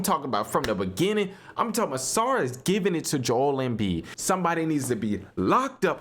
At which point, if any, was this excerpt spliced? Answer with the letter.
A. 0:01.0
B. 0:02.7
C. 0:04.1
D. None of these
C